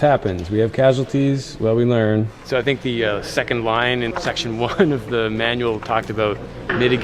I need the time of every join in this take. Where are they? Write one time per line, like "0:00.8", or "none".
0:02.5